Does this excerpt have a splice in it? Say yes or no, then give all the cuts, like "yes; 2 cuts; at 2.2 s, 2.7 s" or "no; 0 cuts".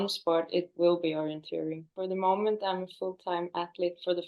yes; 1 cut; at 2.0 s